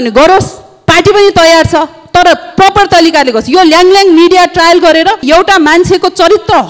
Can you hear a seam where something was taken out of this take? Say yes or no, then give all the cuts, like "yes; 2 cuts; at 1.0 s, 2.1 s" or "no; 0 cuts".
yes; 1 cut; at 5.2 s